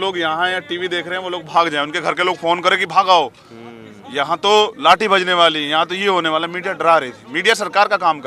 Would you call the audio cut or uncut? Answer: uncut